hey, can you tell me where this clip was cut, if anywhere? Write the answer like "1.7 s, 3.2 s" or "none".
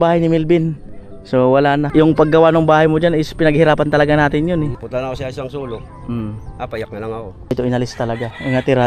1.9 s, 4.8 s, 7.5 s